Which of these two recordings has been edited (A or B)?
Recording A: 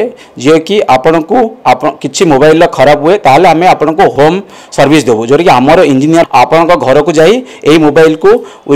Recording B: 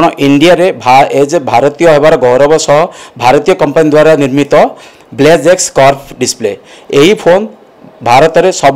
A